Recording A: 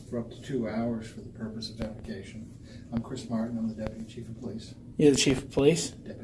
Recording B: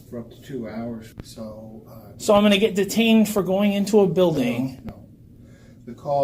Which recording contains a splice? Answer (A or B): B